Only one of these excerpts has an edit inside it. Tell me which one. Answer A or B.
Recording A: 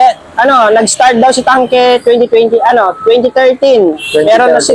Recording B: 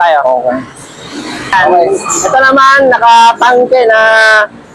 B